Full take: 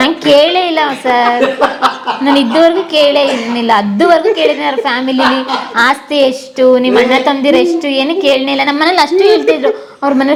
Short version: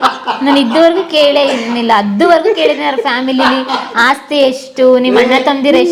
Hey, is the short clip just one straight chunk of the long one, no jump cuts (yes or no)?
yes